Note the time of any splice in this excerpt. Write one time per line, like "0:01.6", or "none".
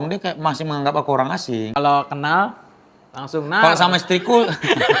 0:01.7